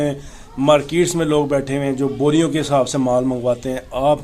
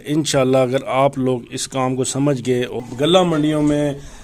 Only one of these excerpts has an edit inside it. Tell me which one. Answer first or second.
second